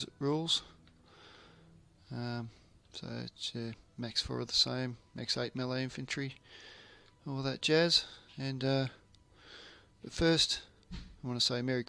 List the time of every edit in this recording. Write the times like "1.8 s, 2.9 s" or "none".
3.2 s